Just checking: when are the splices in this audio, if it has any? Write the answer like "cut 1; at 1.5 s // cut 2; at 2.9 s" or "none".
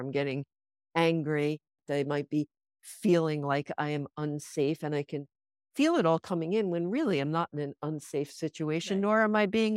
cut 1; at 1.8 s